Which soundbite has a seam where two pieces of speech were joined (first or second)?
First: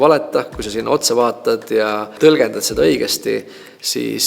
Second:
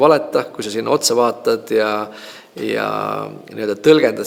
first